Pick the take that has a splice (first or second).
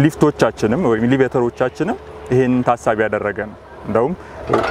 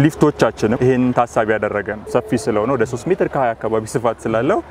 second